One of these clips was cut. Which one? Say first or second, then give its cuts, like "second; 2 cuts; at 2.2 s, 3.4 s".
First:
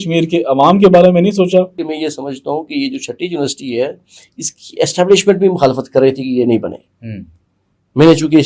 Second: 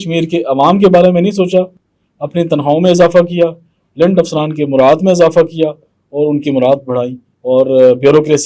first; 1 cut; at 1.8 s